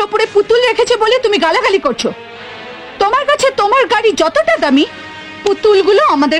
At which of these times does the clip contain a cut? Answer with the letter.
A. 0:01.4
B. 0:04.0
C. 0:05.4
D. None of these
D